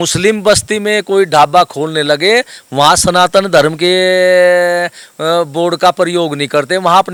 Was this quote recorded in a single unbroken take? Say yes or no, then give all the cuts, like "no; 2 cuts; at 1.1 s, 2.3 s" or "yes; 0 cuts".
yes; 0 cuts